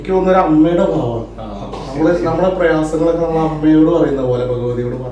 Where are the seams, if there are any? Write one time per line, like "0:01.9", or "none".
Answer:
none